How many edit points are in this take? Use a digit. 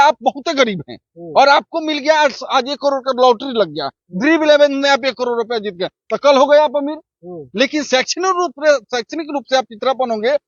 0